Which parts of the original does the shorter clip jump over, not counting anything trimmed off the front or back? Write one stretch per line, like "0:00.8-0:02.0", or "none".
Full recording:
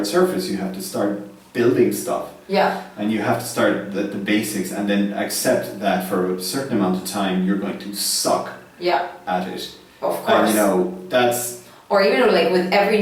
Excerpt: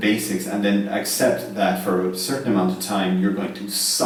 none